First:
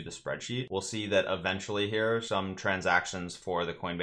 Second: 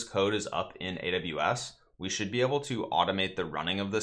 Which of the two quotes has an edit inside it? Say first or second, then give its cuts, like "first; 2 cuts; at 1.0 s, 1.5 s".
first; 1 cut; at 2.2 s